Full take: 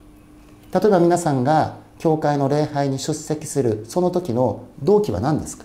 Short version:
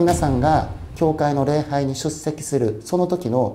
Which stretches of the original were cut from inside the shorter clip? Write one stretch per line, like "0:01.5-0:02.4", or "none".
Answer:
none